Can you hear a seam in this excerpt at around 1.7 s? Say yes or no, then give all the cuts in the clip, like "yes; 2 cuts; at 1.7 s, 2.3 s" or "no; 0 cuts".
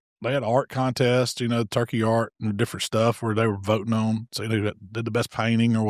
no; 0 cuts